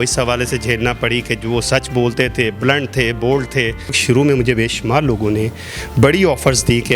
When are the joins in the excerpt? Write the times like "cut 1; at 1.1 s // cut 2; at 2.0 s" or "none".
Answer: cut 1; at 4.0 s